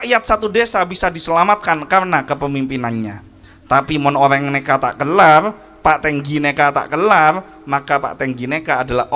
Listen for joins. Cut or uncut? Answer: uncut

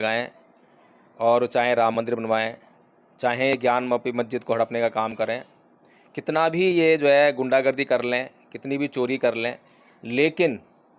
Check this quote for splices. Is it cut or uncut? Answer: uncut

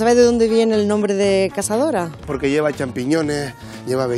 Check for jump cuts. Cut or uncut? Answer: cut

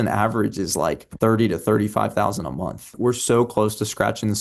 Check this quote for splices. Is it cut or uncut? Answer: cut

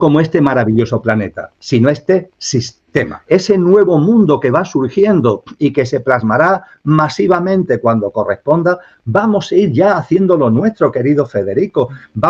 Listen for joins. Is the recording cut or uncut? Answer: cut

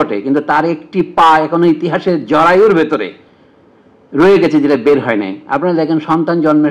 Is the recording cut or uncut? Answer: uncut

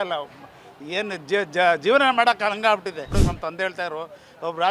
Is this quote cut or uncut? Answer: cut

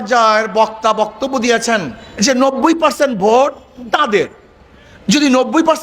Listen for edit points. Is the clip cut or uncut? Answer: cut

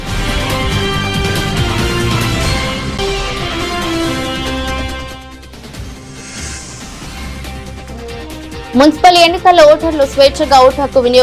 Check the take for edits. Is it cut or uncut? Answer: uncut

